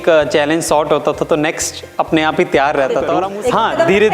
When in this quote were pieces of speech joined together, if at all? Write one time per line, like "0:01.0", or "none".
0:03.2